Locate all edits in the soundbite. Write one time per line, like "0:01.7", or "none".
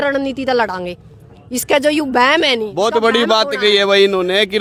none